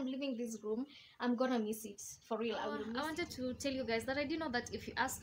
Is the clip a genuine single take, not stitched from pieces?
no; 1 cut; at 2.9 s

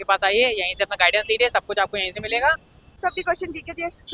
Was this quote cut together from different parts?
yes; 1 cut; at 3.0 s

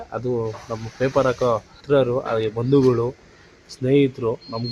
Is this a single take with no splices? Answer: no; 1 cut; at 1.8 s

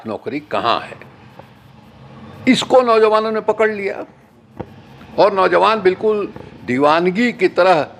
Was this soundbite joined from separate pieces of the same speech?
no; 0 cuts

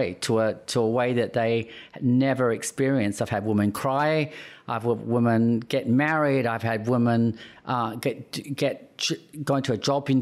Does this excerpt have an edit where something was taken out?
no; 0 cuts

